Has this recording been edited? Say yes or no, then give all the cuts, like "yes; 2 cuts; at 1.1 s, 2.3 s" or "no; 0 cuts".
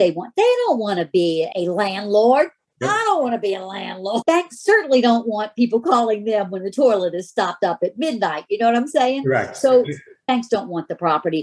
yes; 2 cuts; at 4.2 s, 10.2 s